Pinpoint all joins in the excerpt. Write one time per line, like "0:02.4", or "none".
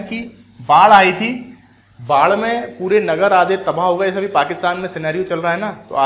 none